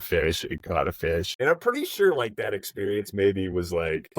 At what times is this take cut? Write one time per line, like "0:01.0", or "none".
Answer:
0:01.3

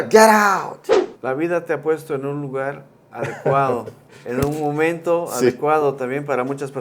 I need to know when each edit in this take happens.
0:01.1

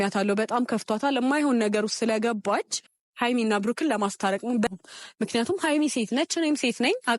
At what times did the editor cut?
0:04.7

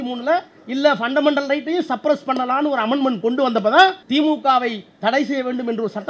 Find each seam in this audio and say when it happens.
0:04.0

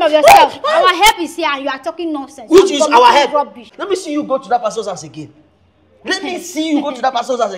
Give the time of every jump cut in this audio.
0:03.6

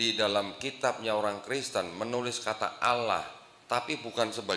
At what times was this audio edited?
none

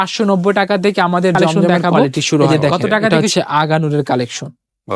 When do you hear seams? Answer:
0:03.1

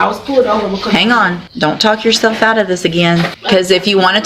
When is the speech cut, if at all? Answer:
0:01.4
0:03.4

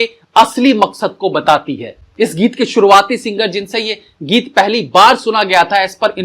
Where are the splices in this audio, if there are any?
none

